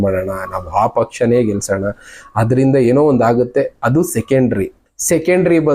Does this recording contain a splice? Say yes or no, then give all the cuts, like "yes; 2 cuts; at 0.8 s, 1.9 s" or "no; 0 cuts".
yes; 1 cut; at 4.8 s